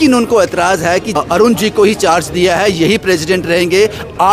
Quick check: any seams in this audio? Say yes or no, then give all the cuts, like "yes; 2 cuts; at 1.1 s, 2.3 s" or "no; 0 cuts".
yes; 1 cut; at 1.2 s